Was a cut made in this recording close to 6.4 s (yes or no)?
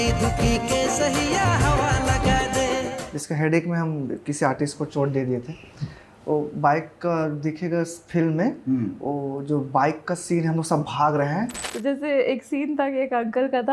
no